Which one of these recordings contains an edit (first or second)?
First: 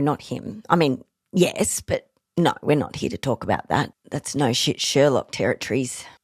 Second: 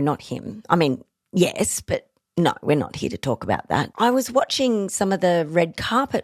second